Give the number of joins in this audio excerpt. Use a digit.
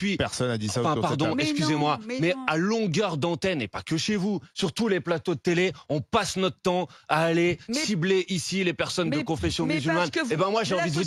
0